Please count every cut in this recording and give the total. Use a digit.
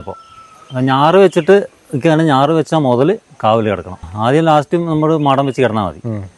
1